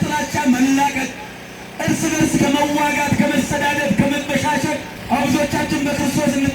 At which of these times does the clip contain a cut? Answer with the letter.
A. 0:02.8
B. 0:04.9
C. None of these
B